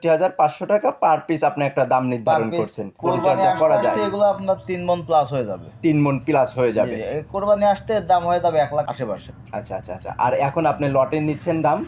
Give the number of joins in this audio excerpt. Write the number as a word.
two